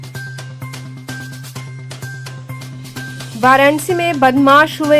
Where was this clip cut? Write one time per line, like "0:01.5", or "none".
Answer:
0:01.2